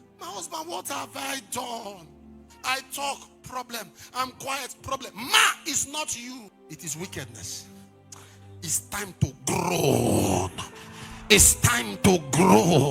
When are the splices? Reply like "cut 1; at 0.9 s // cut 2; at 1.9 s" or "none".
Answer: cut 1; at 6.6 s